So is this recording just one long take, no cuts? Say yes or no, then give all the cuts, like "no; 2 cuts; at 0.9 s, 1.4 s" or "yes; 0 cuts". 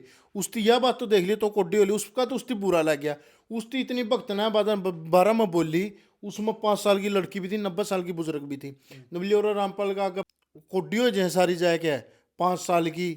no; 1 cut; at 10.2 s